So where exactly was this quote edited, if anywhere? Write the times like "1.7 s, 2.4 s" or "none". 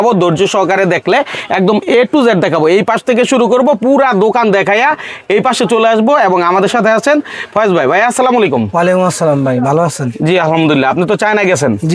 none